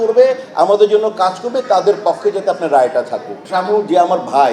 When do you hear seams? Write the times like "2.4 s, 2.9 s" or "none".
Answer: 3.4 s